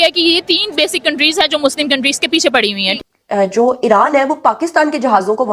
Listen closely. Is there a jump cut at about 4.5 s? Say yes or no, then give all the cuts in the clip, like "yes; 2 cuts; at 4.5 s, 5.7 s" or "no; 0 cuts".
no; 1 cut; at 2.9 s